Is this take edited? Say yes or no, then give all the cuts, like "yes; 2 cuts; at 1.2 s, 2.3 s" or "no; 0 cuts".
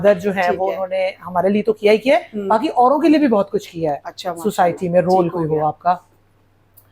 no; 0 cuts